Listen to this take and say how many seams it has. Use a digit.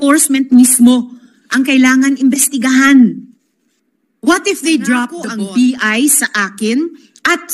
1